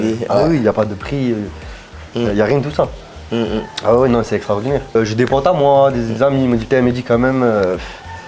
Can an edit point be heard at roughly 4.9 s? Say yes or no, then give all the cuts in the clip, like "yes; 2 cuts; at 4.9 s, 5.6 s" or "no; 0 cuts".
yes; 1 cut; at 4.9 s